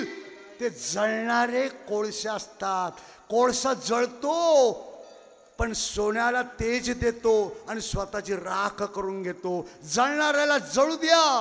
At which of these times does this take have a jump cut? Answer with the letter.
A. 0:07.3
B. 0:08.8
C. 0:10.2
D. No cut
D